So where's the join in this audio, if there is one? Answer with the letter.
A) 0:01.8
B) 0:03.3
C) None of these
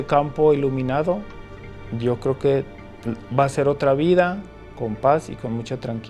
C